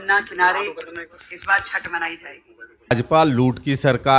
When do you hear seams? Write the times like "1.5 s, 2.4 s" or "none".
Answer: 2.9 s